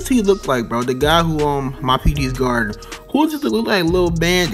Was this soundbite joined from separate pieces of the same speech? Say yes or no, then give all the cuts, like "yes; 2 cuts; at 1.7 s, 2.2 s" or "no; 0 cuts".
no; 0 cuts